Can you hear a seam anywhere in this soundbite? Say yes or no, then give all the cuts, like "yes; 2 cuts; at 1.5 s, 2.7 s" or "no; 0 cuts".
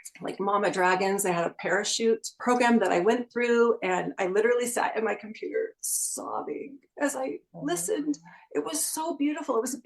yes; 1 cut; at 2.3 s